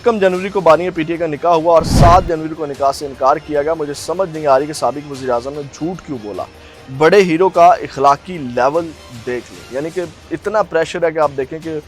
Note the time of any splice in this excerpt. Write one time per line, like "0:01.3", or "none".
none